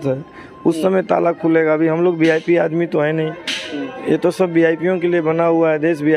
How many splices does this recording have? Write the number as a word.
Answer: zero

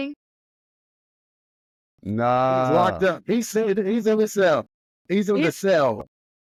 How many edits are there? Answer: zero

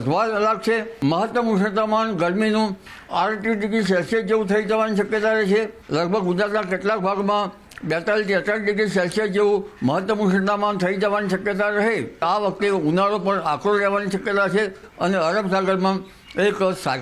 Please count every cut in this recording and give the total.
four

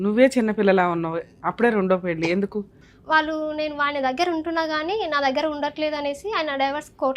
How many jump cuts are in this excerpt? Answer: one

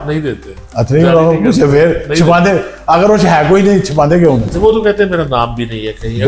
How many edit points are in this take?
one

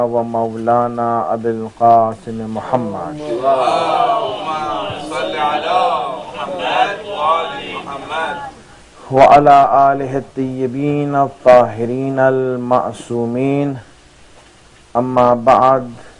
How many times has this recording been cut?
one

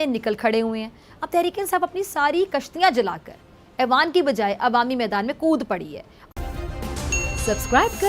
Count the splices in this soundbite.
one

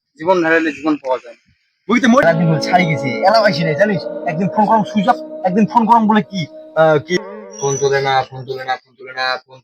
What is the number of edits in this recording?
two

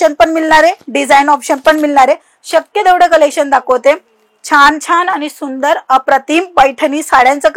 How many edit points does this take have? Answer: zero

